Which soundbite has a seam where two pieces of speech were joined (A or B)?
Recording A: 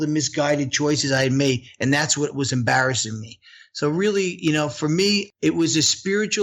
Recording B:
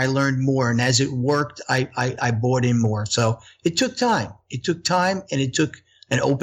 A